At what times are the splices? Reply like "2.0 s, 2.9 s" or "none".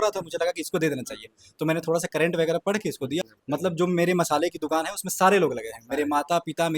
3.2 s